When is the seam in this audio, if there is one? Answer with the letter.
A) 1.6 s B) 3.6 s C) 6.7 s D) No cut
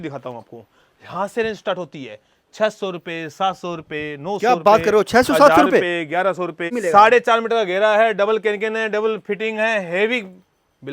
C